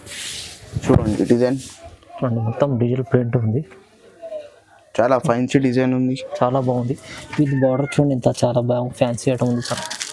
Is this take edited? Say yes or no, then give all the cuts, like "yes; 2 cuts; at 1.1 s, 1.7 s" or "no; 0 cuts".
no; 0 cuts